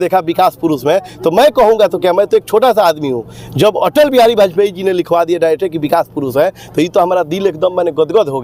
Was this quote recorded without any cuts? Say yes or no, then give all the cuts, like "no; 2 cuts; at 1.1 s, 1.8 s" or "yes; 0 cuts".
yes; 0 cuts